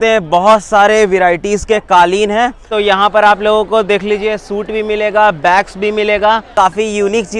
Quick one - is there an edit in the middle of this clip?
yes; 2 cuts; at 2.7 s, 6.5 s

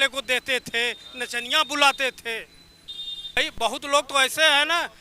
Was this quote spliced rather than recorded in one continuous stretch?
yes; 1 cut; at 3.4 s

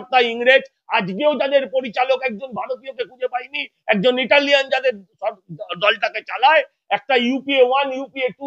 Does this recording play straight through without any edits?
yes; 0 cuts

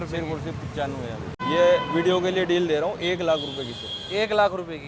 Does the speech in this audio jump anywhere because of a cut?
yes; 1 cut; at 1.4 s

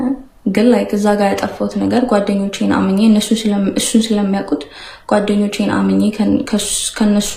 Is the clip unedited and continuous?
yes; 0 cuts

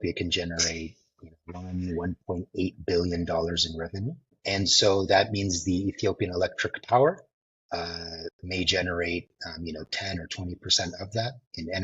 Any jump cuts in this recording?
yes; 1 cut; at 4.4 s

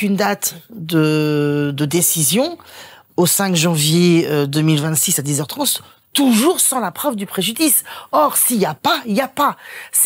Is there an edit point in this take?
no; 0 cuts

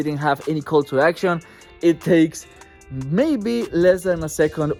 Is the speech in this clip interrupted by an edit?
no; 0 cuts

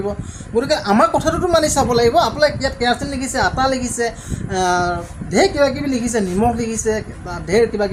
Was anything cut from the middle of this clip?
no; 0 cuts

